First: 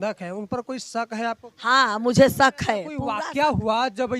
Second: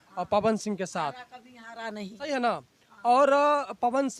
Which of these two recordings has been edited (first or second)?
first